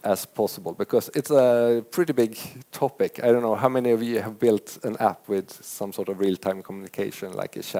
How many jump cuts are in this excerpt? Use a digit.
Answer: 0